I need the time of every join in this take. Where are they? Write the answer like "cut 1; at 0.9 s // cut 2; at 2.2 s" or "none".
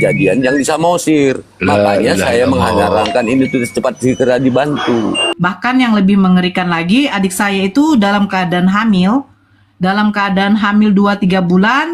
cut 1; at 5.3 s